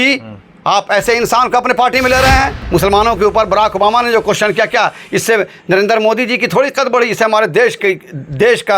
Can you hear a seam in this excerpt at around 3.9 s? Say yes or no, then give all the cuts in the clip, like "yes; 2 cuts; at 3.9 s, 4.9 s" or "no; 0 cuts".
no; 1 cut; at 2.6 s